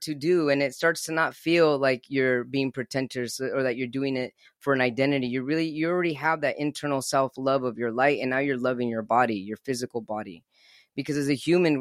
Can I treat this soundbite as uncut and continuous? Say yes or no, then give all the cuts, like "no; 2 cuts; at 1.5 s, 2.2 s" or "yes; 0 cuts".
yes; 0 cuts